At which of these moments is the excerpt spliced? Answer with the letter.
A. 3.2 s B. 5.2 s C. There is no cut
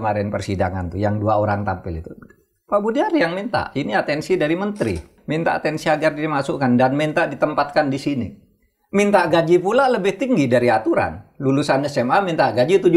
B